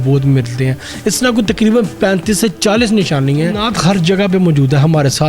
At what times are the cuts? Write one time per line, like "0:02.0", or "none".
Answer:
0:03.6